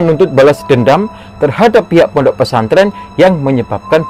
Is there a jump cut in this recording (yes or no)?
no